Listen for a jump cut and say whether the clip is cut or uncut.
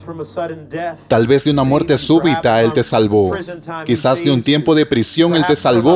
cut